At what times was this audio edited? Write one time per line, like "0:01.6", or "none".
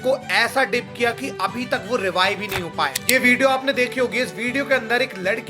0:03.0